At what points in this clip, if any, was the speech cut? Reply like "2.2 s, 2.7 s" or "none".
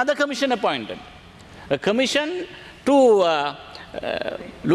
none